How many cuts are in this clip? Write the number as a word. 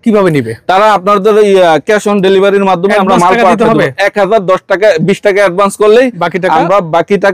zero